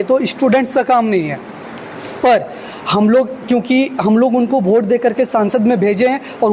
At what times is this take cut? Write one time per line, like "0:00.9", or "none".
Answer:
none